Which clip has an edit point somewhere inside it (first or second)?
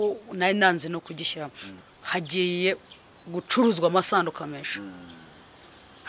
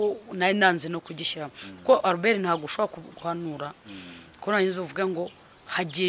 first